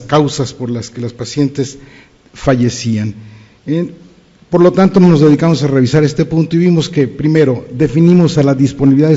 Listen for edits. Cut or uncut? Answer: uncut